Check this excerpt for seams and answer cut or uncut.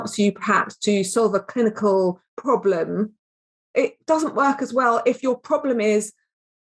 cut